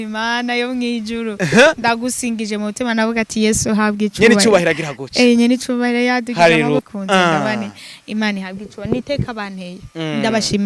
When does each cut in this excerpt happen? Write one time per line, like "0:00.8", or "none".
0:06.8